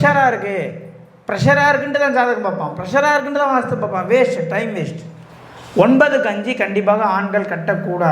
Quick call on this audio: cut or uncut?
cut